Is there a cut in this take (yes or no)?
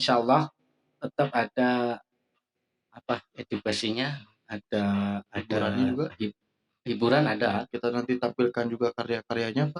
no